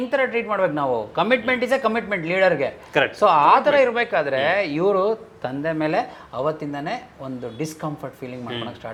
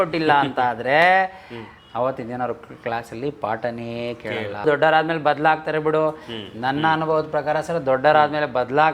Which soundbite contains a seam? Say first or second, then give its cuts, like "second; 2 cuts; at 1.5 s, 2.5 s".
second; 1 cut; at 4.6 s